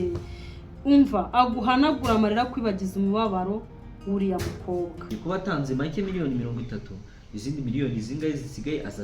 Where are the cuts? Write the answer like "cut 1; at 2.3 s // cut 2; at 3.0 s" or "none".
cut 1; at 5.0 s